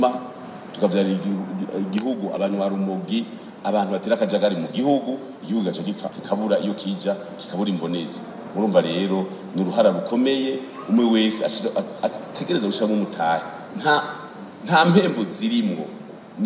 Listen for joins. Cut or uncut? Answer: cut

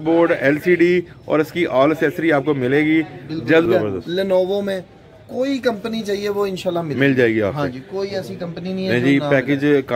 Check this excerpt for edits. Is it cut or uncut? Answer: cut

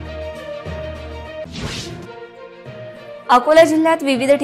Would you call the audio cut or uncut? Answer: cut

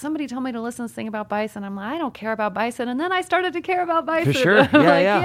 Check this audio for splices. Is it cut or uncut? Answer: uncut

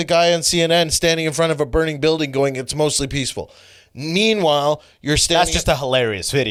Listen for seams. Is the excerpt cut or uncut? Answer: uncut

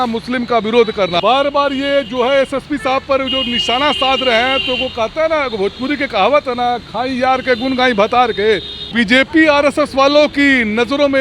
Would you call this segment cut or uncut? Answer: cut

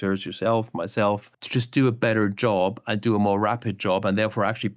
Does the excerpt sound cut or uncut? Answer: cut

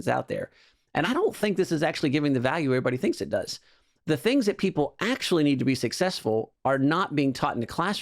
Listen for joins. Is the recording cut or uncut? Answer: cut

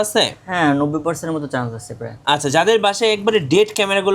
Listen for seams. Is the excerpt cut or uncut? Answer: uncut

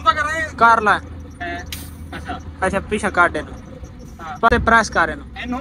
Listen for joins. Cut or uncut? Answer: cut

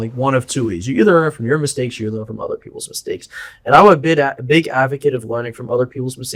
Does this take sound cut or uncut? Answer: uncut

